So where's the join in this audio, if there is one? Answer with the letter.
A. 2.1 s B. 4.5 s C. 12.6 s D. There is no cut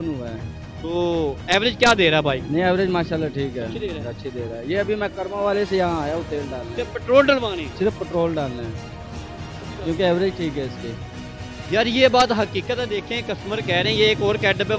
D